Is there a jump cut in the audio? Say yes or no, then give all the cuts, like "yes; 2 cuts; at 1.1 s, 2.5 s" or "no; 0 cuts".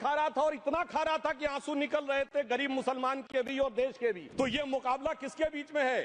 yes; 1 cut; at 4.2 s